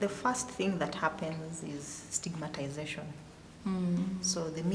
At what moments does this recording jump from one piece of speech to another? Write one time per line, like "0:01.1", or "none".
none